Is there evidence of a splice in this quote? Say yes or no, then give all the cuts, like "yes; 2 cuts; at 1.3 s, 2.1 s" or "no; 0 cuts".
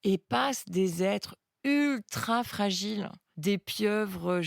yes; 1 cut; at 3.2 s